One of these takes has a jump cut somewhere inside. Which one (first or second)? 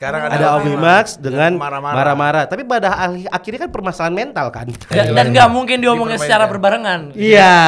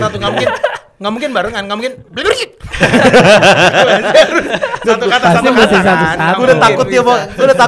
first